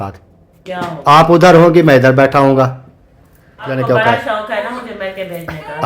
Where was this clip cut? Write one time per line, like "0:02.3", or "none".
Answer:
0:03.7